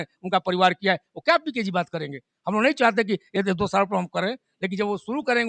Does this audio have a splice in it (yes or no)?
no